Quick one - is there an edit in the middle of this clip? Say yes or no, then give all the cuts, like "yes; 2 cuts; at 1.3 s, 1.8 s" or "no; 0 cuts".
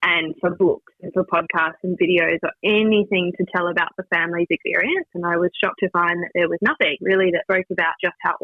yes; 1 cut; at 5.1 s